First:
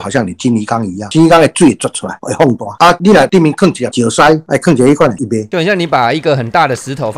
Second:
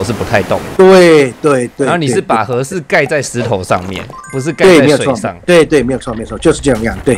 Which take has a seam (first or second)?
first